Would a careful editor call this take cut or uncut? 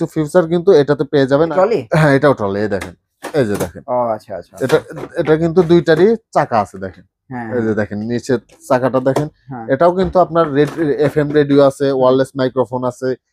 cut